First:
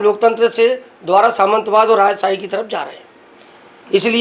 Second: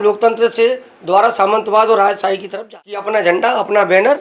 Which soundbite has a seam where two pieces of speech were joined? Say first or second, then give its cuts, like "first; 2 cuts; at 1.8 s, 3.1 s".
second; 1 cut; at 2.5 s